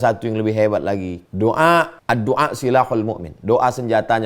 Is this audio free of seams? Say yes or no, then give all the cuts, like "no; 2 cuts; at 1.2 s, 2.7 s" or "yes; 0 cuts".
no; 2 cuts; at 1.2 s, 2.0 s